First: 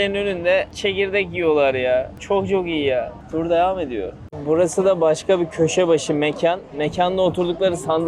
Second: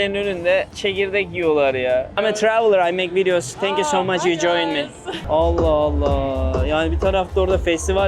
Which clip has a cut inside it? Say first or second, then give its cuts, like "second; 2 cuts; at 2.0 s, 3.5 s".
second; 2 cuts; at 2.1 s, 5.2 s